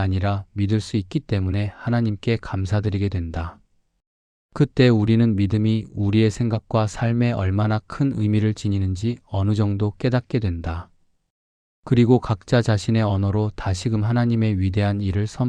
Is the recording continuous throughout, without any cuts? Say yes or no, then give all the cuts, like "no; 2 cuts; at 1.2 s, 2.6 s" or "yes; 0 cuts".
yes; 0 cuts